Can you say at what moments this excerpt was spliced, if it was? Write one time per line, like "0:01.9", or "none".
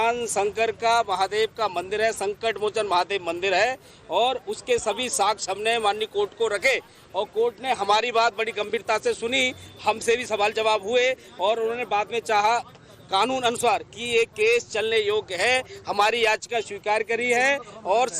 0:08.1

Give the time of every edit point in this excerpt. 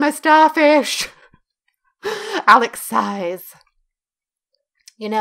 none

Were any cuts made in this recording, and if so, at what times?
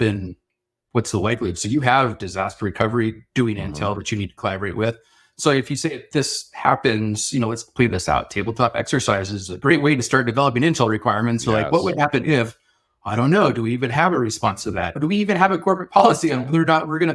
0:15.0

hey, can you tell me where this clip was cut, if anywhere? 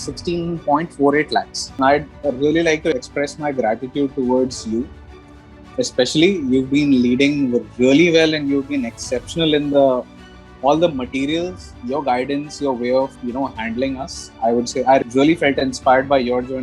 0:01.8
0:02.9
0:13.2
0:15.0

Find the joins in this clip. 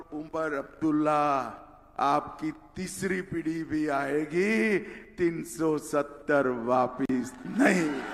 none

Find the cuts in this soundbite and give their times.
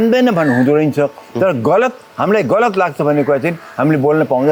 none

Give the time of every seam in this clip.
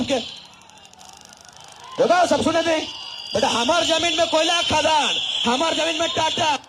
none

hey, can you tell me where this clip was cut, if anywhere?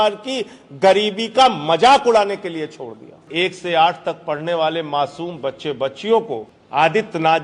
0:03.2
0:06.5

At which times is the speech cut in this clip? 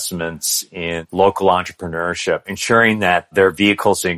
0:01.0
0:02.5

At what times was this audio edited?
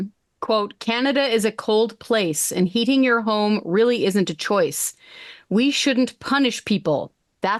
none

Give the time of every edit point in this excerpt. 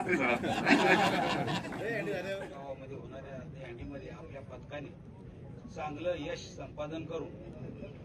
0:02.5

